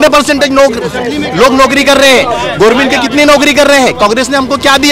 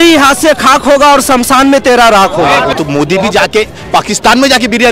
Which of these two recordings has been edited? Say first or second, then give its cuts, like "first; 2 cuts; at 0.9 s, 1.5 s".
second; 1 cut; at 2.7 s